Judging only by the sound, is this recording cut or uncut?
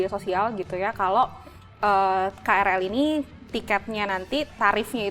uncut